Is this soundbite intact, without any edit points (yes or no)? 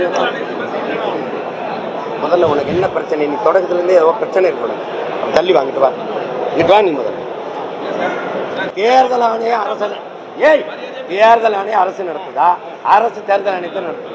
yes